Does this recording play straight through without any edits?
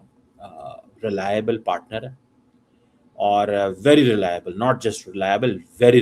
yes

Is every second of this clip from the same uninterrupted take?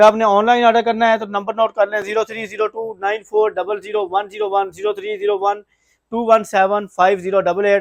yes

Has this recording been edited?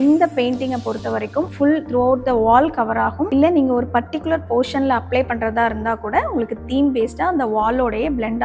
no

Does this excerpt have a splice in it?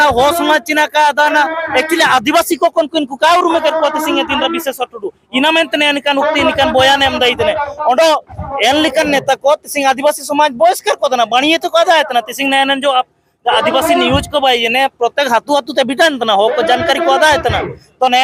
no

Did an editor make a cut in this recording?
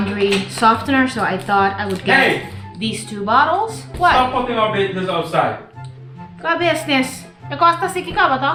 no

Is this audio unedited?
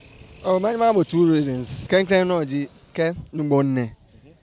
no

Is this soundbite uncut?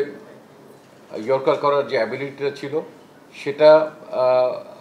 yes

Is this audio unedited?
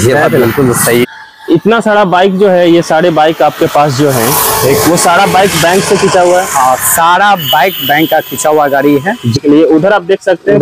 no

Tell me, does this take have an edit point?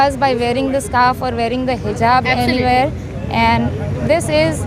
no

